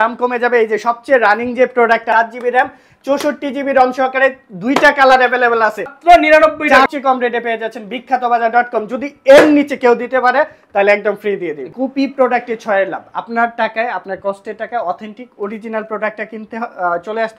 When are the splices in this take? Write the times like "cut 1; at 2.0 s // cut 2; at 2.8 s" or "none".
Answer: cut 1; at 2.1 s // cut 2; at 5.9 s // cut 3; at 6.9 s // cut 4; at 11.7 s